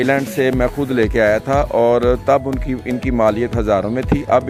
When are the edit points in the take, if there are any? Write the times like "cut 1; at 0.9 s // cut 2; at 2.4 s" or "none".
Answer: none